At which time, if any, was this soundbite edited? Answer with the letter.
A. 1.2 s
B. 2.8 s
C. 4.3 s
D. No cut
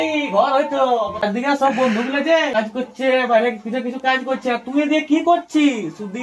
A